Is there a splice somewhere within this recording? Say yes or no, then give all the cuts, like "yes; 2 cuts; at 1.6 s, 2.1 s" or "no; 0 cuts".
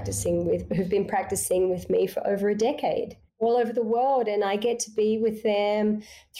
yes; 1 cut; at 3.2 s